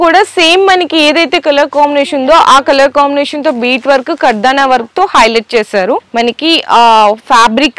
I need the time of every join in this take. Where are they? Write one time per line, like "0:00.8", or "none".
0:06.1